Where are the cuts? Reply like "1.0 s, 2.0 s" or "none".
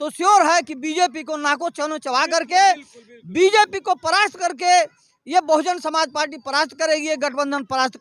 none